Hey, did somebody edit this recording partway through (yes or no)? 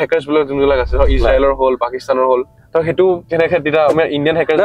yes